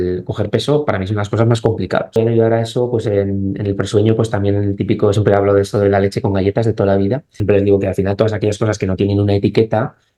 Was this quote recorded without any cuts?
no; 2 cuts; at 2.2 s, 7.4 s

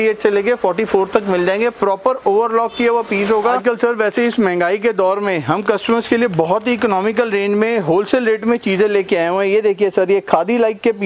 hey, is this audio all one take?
no; 1 cut; at 3.6 s

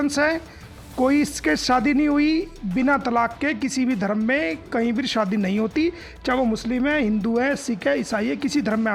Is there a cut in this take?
no; 0 cuts

